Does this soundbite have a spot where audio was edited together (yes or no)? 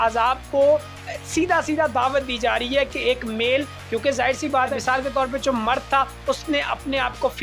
no